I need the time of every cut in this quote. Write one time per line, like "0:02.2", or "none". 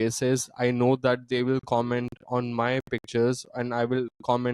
none

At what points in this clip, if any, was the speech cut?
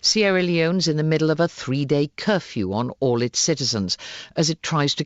0:01.2

